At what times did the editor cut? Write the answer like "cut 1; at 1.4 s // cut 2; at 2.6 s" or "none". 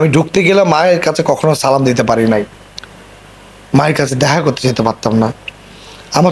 none